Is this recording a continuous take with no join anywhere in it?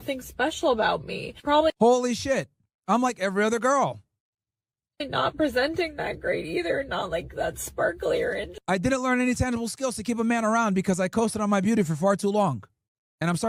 yes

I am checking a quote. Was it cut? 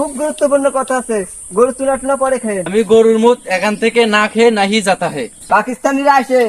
yes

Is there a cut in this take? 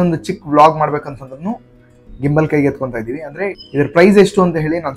yes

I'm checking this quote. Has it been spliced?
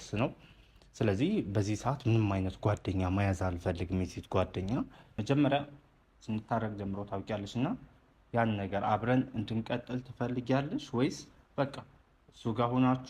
yes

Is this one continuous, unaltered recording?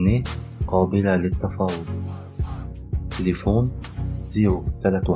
yes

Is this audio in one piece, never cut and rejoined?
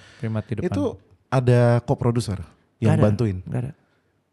no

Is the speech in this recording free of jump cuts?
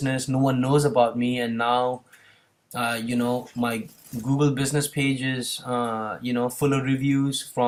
yes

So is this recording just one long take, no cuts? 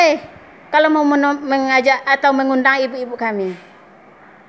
yes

